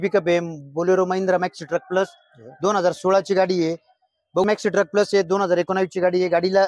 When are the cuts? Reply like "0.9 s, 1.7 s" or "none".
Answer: 4.4 s